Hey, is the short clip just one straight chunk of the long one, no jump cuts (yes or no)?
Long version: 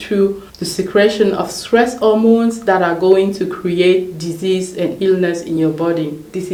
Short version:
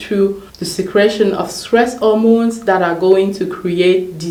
yes